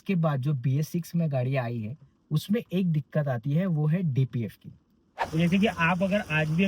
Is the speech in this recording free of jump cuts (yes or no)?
no